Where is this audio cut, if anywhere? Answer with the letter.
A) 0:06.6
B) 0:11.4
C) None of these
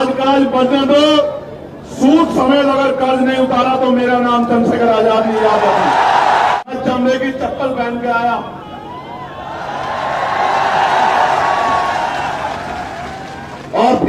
A